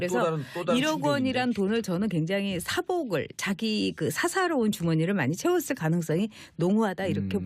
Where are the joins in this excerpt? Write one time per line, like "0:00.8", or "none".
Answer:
0:01.2